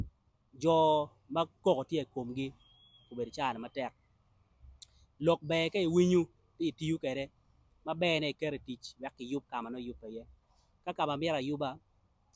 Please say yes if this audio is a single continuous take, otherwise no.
yes